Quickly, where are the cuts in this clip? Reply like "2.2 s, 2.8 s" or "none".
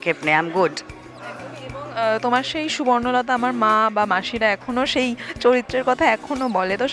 none